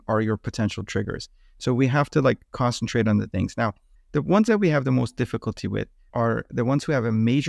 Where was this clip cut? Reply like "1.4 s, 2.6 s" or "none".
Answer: 3.8 s, 6.0 s